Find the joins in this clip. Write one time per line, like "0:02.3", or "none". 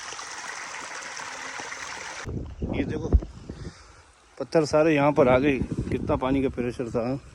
0:02.2